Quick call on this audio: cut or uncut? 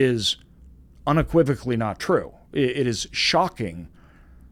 uncut